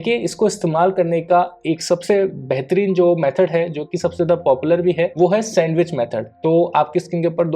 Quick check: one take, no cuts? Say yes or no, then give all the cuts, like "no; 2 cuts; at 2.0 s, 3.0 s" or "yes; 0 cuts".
no; 2 cuts; at 5.1 s, 6.3 s